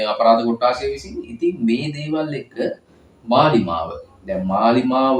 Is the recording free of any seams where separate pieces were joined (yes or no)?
yes